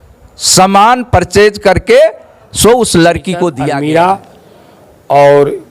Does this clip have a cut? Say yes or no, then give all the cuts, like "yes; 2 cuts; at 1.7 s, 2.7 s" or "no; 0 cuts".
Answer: yes; 1 cut; at 3.6 s